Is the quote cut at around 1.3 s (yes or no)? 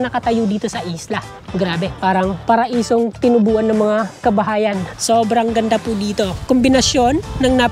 yes